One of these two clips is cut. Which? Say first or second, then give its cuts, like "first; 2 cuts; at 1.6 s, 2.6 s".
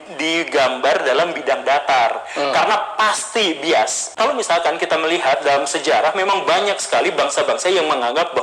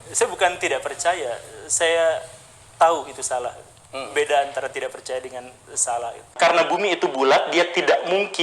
second; 1 cut; at 6.2 s